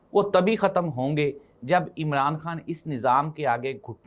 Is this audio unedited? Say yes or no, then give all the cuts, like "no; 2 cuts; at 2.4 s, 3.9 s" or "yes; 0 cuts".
yes; 0 cuts